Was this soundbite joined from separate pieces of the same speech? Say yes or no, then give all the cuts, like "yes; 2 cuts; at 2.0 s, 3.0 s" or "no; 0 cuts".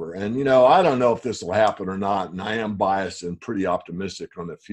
no; 0 cuts